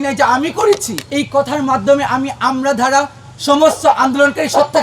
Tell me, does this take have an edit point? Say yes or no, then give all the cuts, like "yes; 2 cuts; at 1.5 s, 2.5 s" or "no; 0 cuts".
yes; 1 cut; at 1.0 s